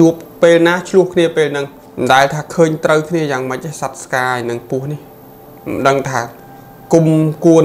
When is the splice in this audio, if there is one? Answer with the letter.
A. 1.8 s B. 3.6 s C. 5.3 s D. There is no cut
A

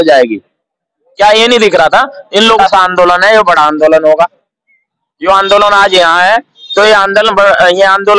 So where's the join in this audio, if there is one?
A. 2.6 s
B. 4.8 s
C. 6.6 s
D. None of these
A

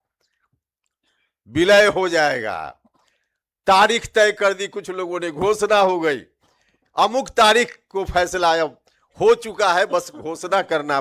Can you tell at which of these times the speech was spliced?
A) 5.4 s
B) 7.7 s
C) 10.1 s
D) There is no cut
D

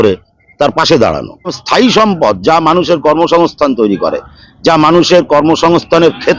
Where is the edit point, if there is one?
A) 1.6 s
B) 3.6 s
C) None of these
A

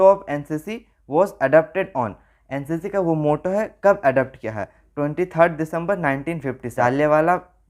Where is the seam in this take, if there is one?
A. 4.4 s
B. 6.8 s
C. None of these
B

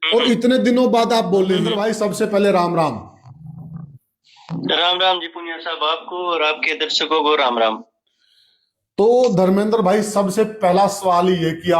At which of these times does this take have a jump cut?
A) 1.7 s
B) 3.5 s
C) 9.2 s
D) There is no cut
A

